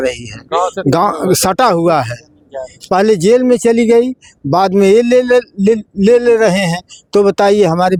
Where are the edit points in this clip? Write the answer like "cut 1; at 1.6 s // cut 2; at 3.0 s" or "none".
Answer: none